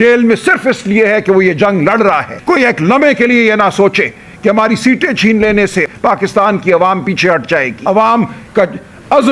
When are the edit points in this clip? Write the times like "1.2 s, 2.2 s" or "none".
2.3 s, 5.9 s, 7.7 s